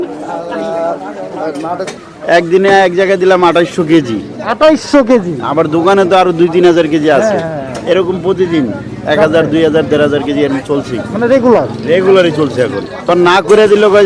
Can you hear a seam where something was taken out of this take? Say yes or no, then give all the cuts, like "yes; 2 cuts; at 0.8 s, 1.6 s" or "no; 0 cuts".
yes; 2 cuts; at 1.9 s, 13.1 s